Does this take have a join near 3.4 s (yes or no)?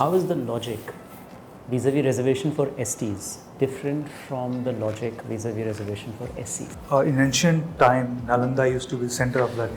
no